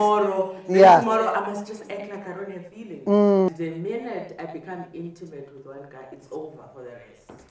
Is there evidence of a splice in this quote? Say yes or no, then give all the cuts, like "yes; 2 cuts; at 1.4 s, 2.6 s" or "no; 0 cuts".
yes; 1 cut; at 3.5 s